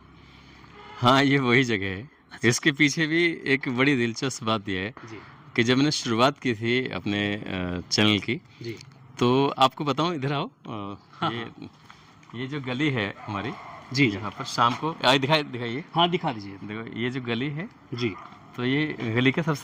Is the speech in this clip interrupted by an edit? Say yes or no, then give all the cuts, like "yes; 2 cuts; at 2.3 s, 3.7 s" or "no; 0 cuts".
no; 0 cuts